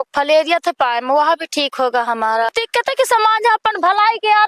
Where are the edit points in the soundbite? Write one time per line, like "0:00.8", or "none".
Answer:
0:02.5